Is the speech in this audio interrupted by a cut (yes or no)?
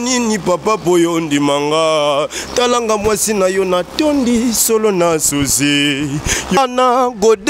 yes